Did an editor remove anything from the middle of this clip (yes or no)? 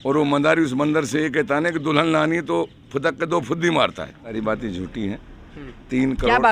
yes